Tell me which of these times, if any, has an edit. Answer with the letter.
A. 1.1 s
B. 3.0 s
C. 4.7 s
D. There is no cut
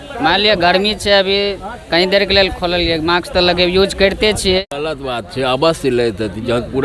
C